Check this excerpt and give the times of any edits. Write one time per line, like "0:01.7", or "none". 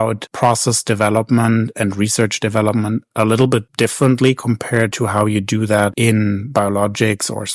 0:05.9